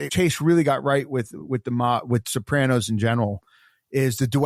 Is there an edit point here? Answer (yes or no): no